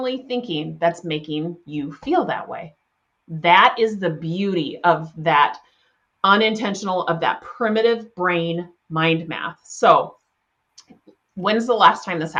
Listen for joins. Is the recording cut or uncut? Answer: uncut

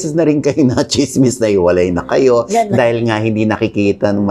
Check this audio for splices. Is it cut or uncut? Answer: uncut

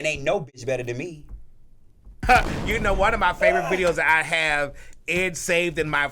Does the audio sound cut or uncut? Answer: cut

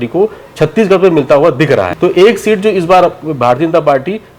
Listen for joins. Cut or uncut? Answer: cut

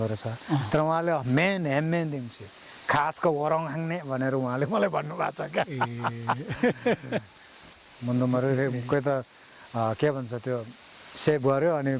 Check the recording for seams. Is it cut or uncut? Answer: cut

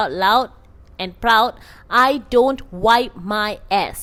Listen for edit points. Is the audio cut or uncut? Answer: uncut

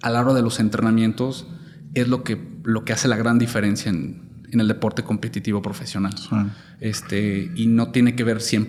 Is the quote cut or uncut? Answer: uncut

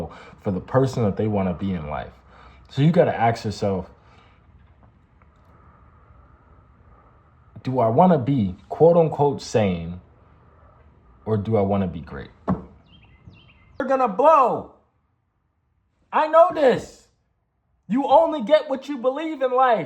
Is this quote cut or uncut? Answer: cut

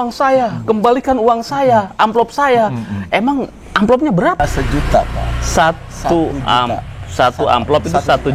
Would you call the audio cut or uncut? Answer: cut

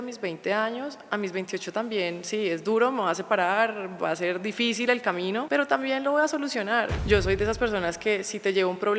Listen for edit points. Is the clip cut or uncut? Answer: cut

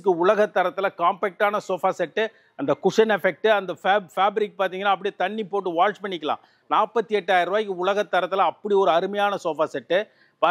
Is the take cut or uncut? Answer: uncut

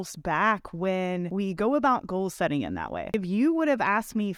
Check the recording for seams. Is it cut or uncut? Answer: cut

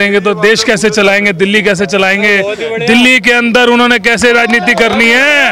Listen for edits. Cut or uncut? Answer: uncut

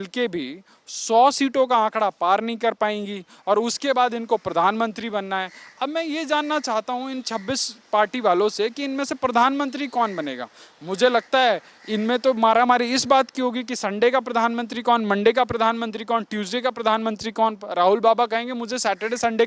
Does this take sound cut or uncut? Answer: uncut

